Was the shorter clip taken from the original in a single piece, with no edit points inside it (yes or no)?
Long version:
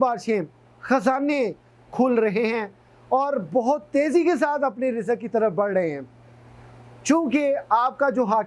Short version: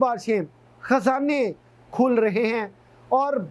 yes